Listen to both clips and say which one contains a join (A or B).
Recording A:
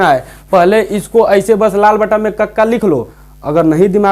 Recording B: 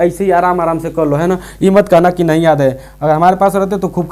A